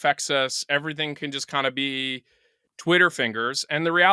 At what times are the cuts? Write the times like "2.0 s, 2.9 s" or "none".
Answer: 2.7 s

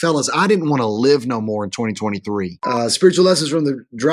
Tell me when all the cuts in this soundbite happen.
2.6 s

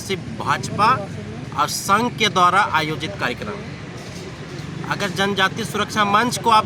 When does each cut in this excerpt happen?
none

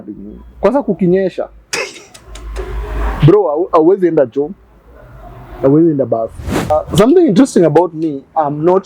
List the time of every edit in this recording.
6.7 s

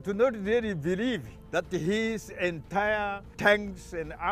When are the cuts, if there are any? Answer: 1.3 s, 3.2 s

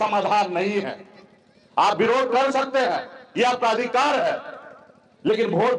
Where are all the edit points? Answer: none

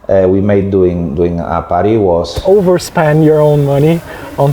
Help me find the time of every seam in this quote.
2.3 s

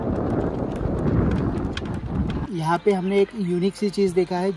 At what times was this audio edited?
2.5 s

